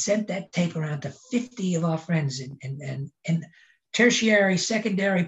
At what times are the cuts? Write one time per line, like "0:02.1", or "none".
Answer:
none